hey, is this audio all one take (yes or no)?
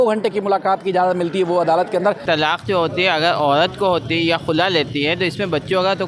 no